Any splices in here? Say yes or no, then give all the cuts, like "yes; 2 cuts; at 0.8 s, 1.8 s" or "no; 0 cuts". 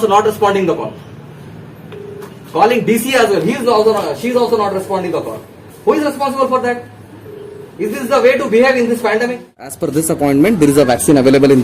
yes; 1 cut; at 9.8 s